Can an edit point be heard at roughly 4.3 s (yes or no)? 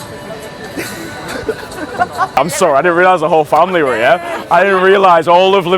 no